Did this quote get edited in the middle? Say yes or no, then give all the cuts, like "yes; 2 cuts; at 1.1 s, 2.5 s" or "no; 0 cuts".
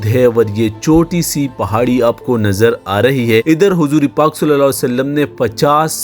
no; 0 cuts